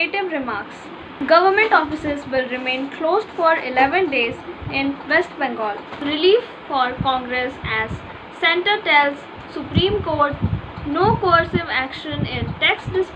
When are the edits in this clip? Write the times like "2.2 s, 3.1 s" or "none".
1.0 s, 5.9 s